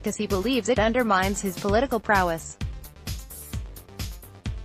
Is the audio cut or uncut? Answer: cut